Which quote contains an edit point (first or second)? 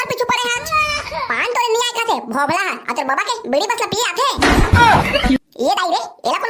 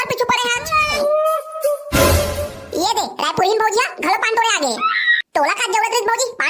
second